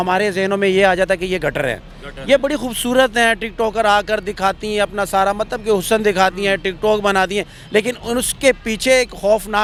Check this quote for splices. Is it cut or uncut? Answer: uncut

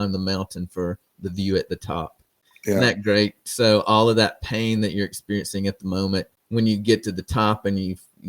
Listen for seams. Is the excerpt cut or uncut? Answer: cut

